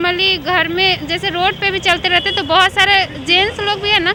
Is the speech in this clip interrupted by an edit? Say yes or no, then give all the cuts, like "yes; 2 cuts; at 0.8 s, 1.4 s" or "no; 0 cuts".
no; 0 cuts